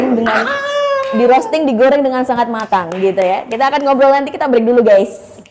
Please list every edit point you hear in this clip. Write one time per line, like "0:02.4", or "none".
none